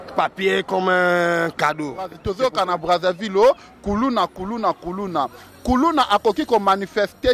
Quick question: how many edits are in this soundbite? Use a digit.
1